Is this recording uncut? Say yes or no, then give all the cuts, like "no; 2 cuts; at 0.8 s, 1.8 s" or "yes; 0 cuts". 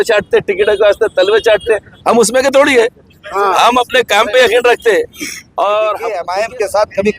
no; 1 cut; at 6.2 s